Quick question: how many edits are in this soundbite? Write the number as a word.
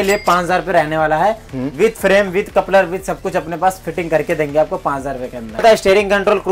one